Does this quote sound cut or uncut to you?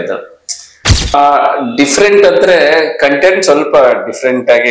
cut